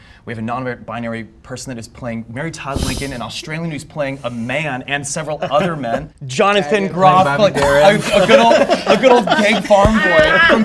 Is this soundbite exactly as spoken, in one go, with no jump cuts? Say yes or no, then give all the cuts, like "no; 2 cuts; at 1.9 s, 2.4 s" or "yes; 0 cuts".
no; 1 cut; at 6.2 s